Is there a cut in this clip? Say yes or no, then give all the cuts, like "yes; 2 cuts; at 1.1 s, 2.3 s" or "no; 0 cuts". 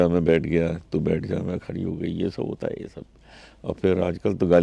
no; 0 cuts